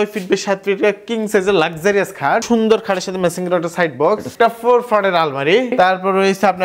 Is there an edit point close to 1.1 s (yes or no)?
no